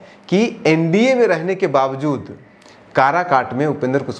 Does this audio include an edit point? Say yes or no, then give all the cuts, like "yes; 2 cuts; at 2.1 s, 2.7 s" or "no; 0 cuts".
no; 0 cuts